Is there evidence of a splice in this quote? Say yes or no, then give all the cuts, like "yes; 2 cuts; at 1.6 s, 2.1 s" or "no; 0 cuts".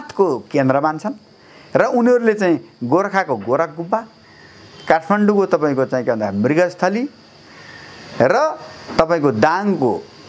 no; 0 cuts